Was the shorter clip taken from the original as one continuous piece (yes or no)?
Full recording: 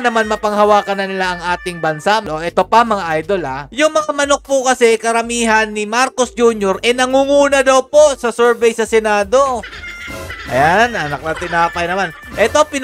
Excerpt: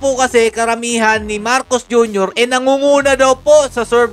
yes